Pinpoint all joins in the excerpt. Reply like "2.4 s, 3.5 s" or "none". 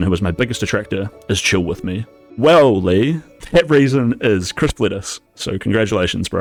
none